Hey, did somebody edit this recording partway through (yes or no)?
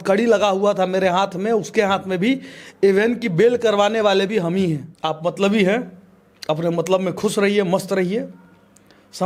yes